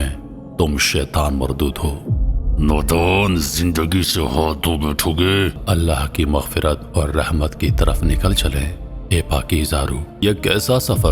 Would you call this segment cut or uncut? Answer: cut